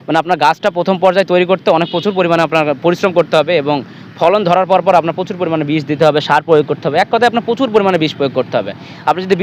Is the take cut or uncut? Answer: uncut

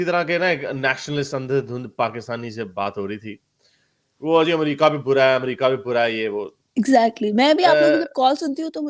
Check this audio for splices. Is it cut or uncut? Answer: uncut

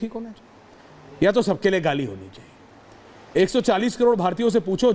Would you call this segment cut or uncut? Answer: uncut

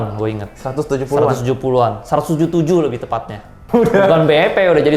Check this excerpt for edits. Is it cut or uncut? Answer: cut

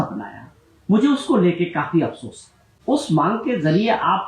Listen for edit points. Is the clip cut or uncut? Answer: cut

